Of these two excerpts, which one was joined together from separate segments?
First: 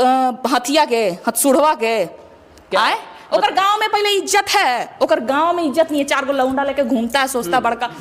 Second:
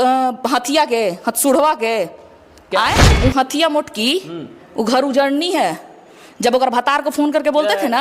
second; 1 cut; at 3.1 s

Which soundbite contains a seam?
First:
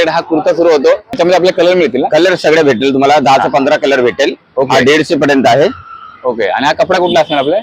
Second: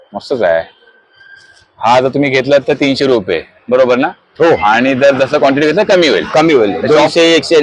first; 1 cut; at 1.1 s

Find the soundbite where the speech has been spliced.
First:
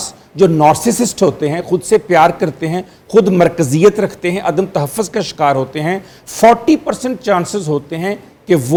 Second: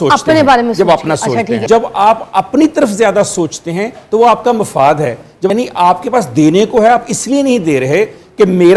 second; 2 cuts; at 1.6 s, 5.5 s

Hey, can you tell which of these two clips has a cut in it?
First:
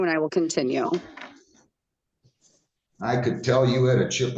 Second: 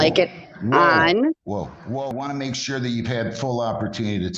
second; 1 cut; at 2.1 s

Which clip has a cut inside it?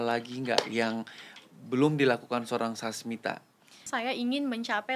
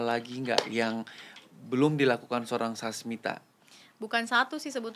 first; 1 cut; at 3.9 s

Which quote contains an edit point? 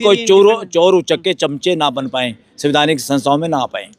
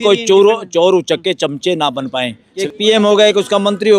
second; 1 cut; at 2.5 s

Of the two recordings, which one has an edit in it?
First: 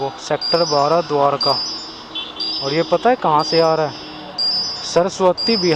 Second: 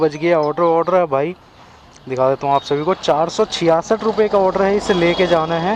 second; 1 cut; at 4.9 s

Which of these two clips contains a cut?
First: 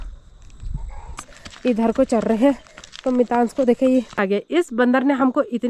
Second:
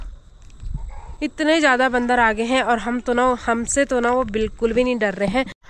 first; 2 cuts; at 1.3 s, 4.2 s

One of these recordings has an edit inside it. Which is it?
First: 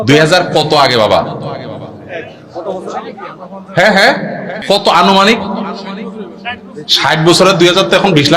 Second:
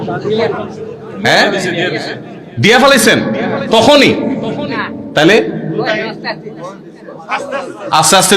first; 1 cut; at 4.5 s

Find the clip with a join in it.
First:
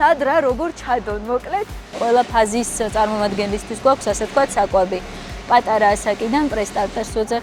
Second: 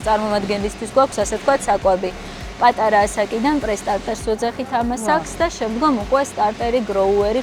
first; 1 cut; at 1.9 s

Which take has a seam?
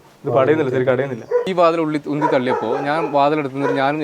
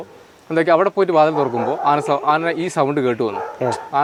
first; 1 cut; at 1.5 s

